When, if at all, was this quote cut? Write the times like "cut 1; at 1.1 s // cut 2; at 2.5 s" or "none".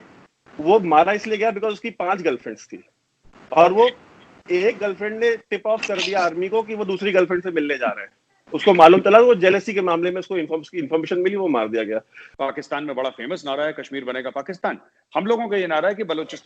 cut 1; at 12.2 s